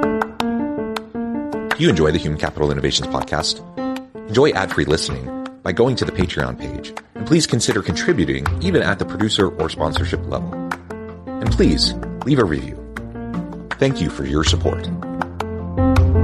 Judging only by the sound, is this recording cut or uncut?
uncut